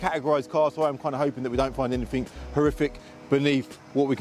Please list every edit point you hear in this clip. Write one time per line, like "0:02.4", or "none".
none